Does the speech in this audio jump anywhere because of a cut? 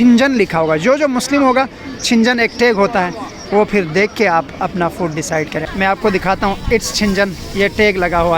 yes; 1 cut; at 5.6 s

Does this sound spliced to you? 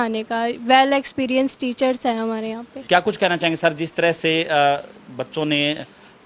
no; 0 cuts

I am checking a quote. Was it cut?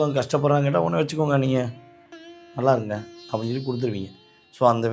no; 0 cuts

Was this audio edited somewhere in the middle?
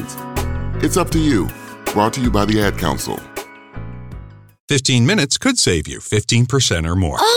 yes; 1 cut; at 4.6 s

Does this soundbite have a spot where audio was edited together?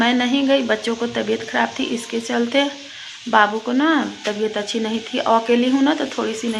no; 0 cuts

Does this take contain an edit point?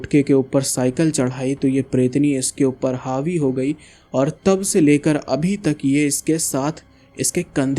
no; 0 cuts

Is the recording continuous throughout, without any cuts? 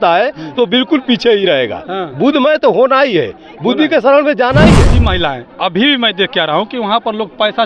no; 1 cut; at 5.0 s

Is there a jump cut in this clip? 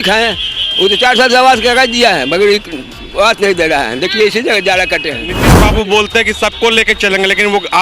yes; 1 cut; at 5.5 s

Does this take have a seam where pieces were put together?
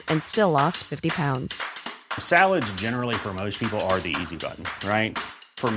no; 0 cuts

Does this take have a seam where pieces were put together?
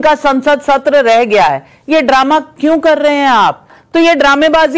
yes; 1 cut; at 3.8 s

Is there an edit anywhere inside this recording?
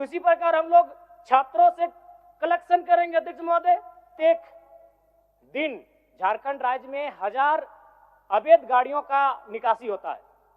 yes; 1 cut; at 4.1 s

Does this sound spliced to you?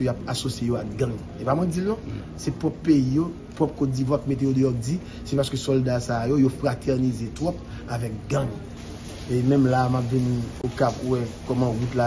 yes; 1 cut; at 8.8 s

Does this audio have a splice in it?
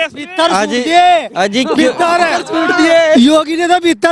no; 0 cuts

